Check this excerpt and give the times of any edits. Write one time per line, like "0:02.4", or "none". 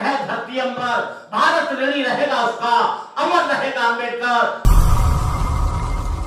0:04.6